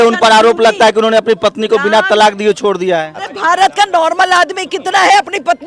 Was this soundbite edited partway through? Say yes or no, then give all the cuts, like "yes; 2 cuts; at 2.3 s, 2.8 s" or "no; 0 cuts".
yes; 1 cut; at 3.2 s